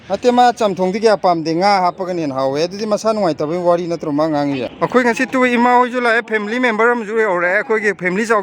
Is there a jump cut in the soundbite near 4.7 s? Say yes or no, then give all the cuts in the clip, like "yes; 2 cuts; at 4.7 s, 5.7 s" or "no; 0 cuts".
yes; 1 cut; at 4.7 s